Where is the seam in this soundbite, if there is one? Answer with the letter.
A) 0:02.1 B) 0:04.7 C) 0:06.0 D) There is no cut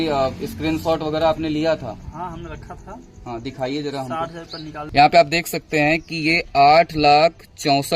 B